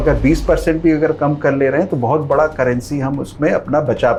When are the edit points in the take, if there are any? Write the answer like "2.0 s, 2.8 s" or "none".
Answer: none